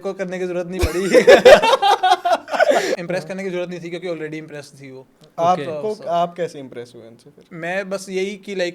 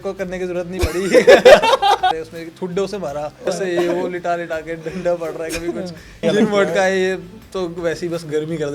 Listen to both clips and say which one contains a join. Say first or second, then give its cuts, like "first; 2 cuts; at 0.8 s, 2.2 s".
second; 3 cuts; at 2.1 s, 3.5 s, 6.1 s